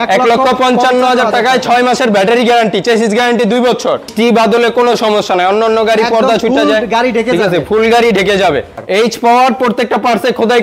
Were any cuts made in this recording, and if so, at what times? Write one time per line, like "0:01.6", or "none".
0:04.1
0:08.8